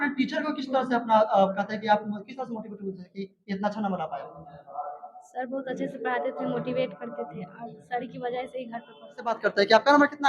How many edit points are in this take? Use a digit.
1